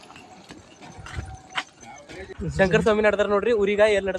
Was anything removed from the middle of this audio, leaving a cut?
yes; 1 cut; at 2.4 s

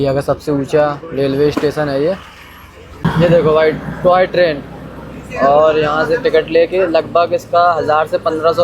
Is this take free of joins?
no; 1 cut; at 2.9 s

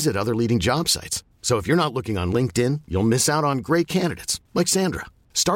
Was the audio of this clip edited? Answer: no; 0 cuts

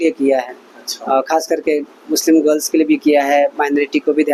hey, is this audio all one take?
yes; 0 cuts

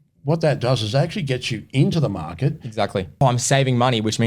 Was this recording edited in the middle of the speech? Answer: yes; 1 cut; at 3.2 s

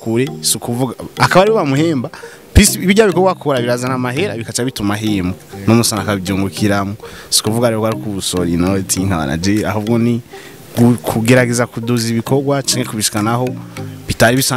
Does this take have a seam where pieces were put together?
no; 0 cuts

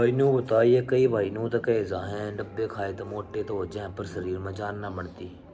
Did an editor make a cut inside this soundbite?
no; 0 cuts

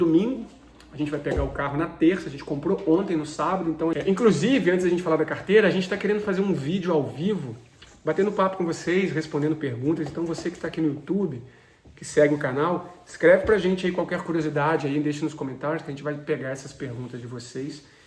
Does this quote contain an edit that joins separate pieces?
yes; 1 cut; at 3.9 s

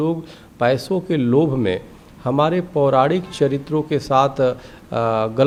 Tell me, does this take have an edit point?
no; 0 cuts

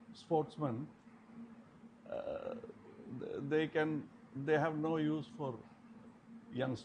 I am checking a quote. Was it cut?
no; 0 cuts

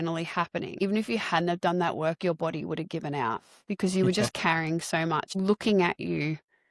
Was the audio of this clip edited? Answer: yes; 2 cuts; at 0.8 s, 5.3 s

